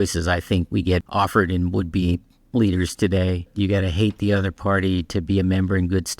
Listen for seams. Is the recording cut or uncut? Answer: cut